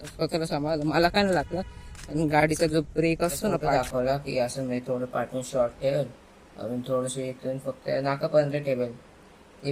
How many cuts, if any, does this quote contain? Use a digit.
1